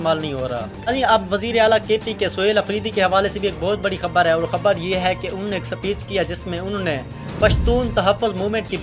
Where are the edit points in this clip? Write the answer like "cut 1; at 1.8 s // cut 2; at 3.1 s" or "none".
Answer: none